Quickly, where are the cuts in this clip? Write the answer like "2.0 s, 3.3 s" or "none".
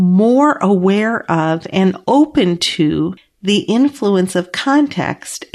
3.3 s